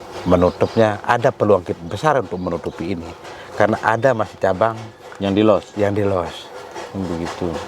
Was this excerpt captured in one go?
yes; 0 cuts

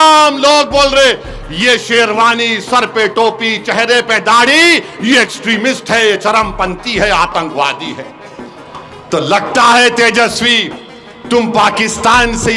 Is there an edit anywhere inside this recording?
no; 0 cuts

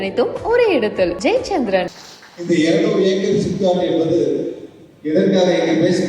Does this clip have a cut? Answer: yes; 1 cut; at 1.9 s

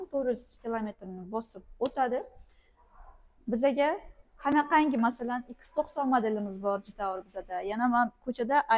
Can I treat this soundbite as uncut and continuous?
yes; 0 cuts

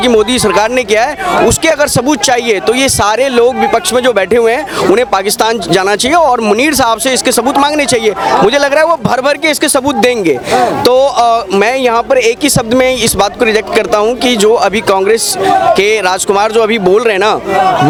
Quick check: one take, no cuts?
yes; 0 cuts

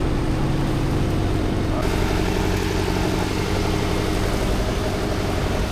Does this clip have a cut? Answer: yes; 1 cut; at 1.8 s

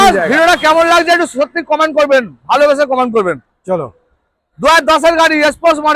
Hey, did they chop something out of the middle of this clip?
no; 0 cuts

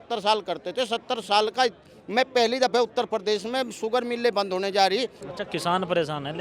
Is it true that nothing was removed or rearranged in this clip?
no; 1 cut; at 5.2 s

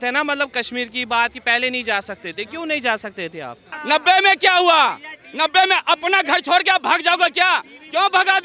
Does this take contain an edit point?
yes; 1 cut; at 3.7 s

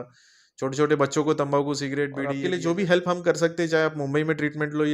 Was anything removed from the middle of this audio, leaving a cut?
yes; 1 cut; at 2.2 s

